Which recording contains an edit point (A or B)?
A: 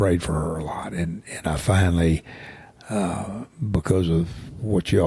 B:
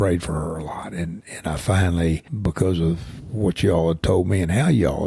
B